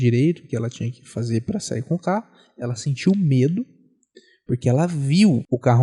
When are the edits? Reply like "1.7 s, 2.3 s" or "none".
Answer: none